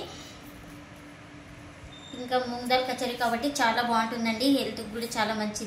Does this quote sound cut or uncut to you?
uncut